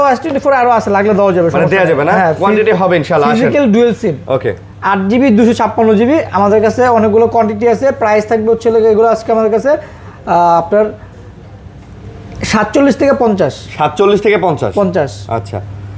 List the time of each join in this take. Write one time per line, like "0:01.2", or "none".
none